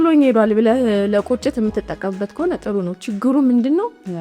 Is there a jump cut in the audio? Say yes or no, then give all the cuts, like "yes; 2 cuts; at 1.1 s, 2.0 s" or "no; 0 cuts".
no; 0 cuts